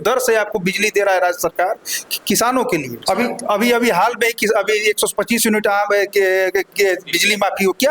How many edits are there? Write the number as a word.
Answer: one